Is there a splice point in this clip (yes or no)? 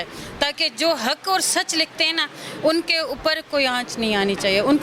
no